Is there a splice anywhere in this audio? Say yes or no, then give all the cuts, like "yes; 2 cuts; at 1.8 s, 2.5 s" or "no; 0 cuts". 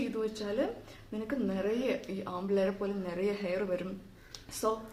no; 0 cuts